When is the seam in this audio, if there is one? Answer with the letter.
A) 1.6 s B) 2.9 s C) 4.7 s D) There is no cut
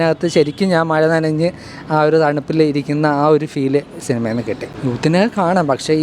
C